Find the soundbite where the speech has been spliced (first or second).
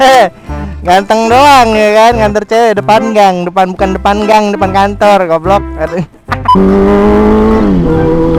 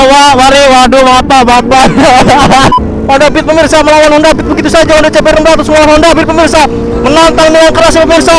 second